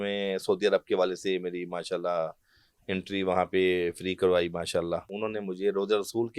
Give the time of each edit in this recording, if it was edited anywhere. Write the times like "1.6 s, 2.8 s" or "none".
5.1 s